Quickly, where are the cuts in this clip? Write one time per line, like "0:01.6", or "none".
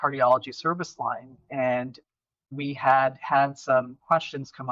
0:02.4